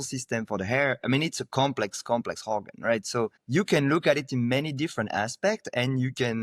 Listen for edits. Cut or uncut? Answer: uncut